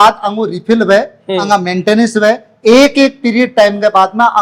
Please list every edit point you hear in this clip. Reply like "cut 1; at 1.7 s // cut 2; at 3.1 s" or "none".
none